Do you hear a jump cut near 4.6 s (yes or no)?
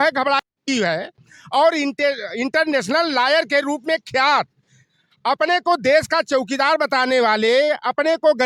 no